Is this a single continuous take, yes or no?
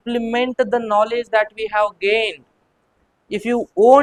yes